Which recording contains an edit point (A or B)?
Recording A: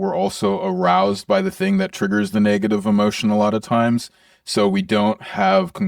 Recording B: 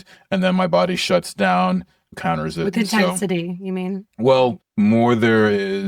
B